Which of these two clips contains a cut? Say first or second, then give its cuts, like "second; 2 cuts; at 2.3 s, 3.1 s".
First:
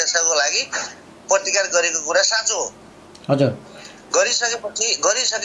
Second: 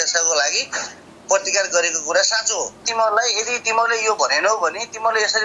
second; 1 cut; at 2.9 s